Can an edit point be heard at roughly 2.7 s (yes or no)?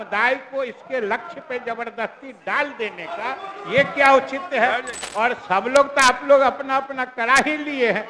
no